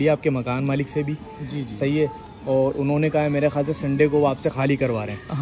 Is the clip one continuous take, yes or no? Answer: yes